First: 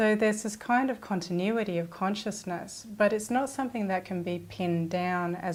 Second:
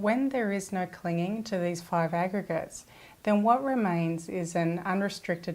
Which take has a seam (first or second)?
second